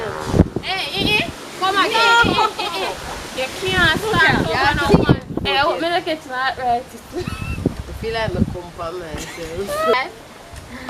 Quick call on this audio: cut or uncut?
cut